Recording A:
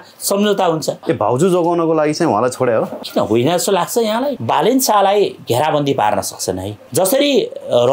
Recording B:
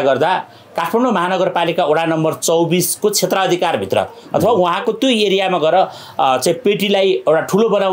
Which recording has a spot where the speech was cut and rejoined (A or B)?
A